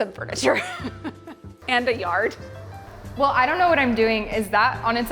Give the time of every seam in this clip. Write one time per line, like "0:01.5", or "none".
0:02.7